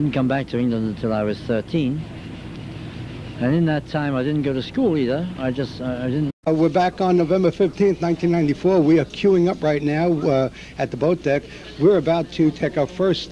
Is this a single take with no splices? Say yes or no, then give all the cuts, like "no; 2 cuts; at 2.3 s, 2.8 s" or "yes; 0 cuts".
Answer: yes; 0 cuts